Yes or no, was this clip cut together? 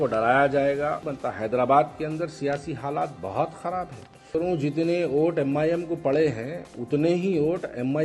yes